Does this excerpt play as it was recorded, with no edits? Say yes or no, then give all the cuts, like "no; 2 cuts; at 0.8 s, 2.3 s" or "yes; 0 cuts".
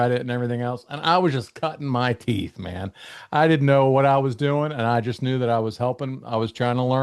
yes; 0 cuts